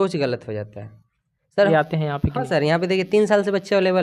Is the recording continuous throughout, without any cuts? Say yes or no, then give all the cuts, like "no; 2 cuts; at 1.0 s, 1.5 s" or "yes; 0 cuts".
no; 1 cut; at 1.7 s